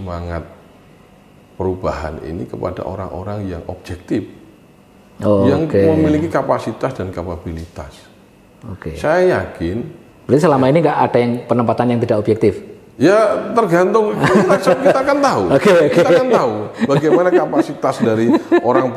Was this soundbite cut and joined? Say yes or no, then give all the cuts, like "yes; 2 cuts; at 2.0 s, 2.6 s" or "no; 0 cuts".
no; 0 cuts